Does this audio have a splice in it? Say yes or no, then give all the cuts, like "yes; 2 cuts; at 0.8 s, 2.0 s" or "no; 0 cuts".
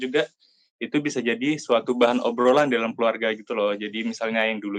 no; 0 cuts